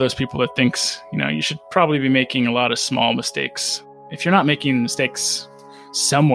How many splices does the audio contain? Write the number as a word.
zero